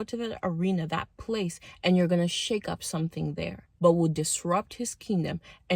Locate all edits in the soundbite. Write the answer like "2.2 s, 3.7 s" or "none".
3.6 s